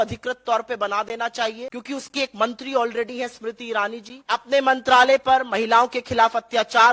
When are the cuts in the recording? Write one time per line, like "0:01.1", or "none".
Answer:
0:01.7
0:04.1